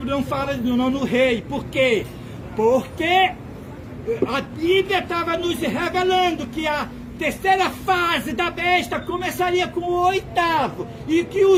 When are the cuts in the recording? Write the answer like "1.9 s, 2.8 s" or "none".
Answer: none